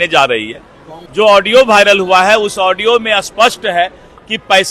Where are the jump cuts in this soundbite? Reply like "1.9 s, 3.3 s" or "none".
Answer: 1.0 s